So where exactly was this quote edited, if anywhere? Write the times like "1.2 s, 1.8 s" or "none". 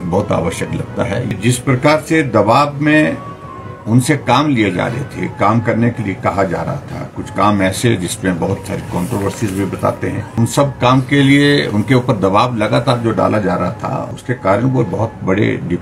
1.3 s, 10.3 s, 14.1 s